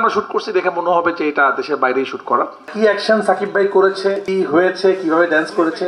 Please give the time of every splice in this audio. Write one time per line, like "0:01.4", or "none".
0:02.7
0:04.2